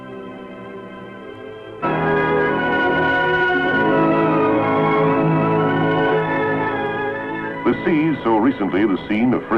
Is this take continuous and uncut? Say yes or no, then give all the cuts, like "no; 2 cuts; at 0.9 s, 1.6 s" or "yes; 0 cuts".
yes; 0 cuts